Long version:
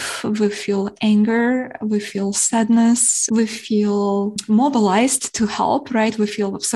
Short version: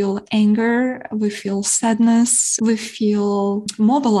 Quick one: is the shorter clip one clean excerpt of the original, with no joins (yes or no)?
yes